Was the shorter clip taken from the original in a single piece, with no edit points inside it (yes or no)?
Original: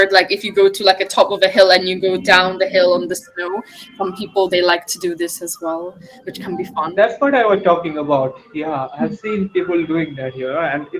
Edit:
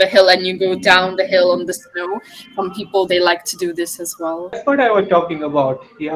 no